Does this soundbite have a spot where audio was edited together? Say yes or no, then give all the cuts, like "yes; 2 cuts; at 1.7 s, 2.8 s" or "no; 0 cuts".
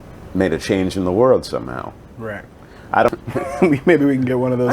yes; 1 cut; at 3.1 s